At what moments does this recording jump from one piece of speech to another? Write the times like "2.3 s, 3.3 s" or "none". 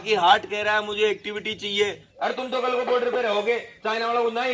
2.0 s